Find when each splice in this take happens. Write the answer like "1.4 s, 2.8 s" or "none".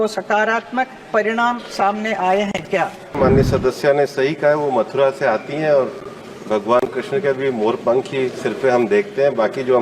3.2 s